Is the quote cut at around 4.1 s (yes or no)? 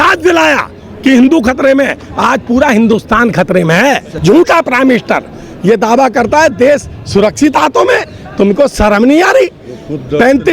yes